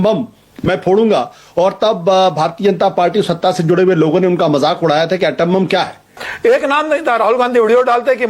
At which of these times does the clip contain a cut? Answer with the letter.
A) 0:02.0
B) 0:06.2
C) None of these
B